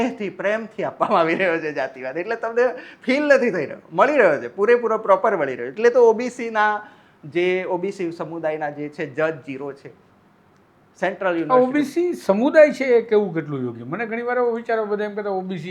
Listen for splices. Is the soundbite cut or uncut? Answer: uncut